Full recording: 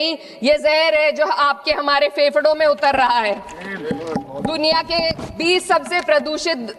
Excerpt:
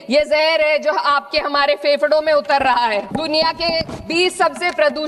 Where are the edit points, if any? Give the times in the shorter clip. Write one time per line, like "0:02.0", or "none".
0:03.1